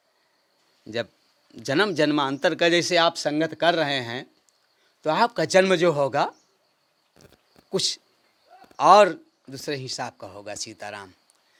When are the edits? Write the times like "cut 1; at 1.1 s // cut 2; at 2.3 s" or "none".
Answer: none